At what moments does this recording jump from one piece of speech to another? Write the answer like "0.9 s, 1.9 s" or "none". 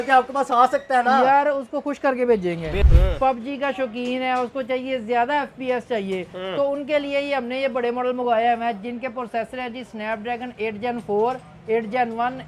2.8 s